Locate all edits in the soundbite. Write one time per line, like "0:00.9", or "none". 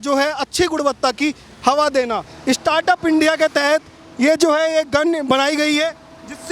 0:02.3